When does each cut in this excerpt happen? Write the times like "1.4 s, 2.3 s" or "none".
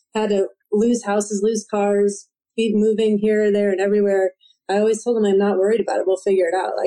none